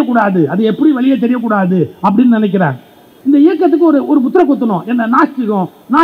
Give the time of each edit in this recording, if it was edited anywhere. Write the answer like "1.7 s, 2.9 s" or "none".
3.1 s